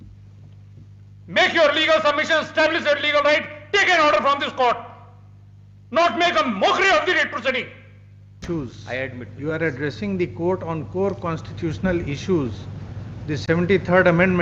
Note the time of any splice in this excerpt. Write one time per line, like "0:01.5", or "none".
0:08.4